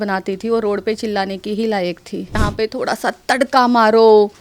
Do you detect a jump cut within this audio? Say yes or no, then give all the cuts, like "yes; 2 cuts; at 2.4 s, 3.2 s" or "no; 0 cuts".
yes; 1 cut; at 2.4 s